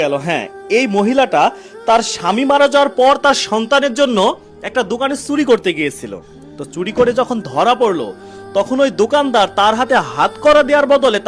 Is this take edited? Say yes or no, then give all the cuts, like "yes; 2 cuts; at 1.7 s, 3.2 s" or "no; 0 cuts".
no; 0 cuts